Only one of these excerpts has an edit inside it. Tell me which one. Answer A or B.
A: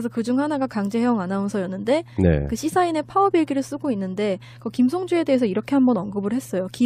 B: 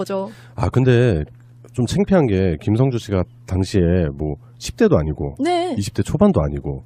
B